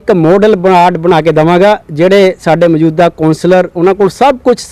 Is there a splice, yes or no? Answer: no